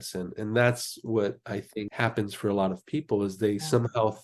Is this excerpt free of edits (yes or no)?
yes